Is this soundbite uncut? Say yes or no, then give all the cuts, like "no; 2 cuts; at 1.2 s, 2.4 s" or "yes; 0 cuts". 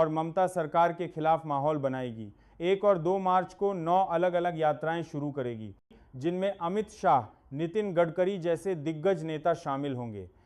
no; 1 cut; at 5.9 s